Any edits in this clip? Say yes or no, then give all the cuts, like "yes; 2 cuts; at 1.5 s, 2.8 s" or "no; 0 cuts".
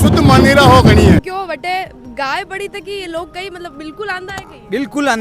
yes; 1 cut; at 1.2 s